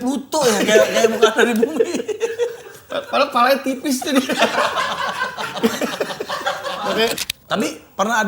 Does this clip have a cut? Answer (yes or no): yes